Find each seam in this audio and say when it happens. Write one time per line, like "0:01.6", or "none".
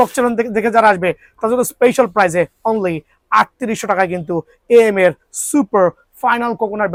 none